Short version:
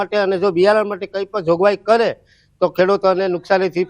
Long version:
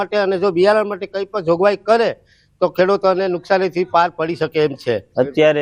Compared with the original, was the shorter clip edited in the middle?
no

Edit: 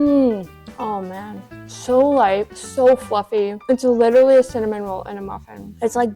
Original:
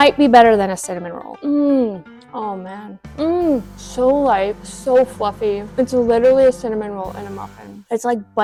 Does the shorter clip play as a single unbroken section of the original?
no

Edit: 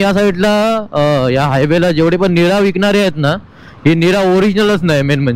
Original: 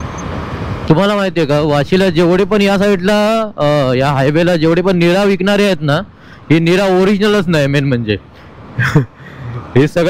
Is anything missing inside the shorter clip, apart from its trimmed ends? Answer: no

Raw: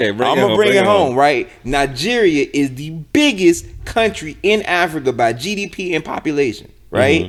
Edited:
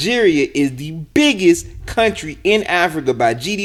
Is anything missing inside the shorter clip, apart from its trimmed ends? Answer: no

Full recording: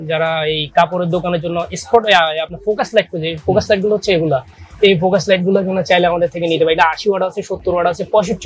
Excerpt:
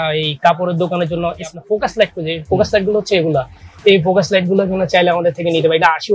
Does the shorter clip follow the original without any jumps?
no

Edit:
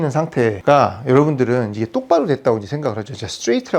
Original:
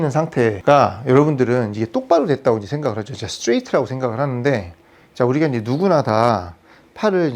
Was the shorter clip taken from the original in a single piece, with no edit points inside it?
yes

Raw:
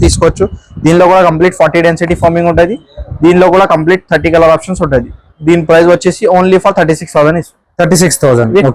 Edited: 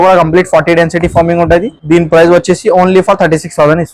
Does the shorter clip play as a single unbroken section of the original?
no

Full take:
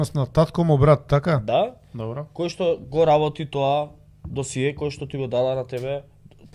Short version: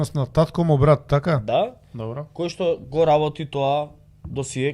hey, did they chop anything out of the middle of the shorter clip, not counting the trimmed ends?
no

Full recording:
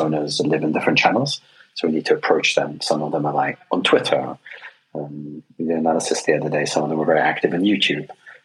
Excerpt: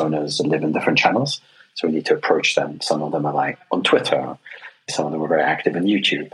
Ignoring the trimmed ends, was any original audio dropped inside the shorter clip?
yes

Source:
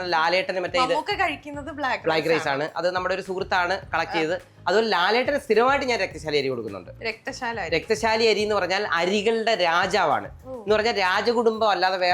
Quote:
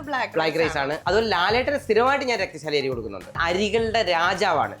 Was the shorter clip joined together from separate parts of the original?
yes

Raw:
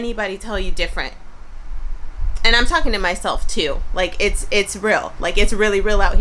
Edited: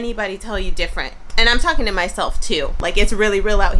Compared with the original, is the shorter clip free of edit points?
no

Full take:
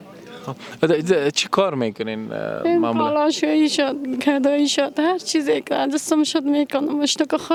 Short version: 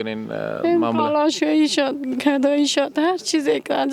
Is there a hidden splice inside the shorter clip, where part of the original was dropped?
no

